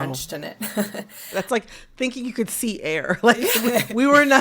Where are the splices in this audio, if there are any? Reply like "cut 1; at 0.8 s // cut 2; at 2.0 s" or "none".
cut 1; at 1.1 s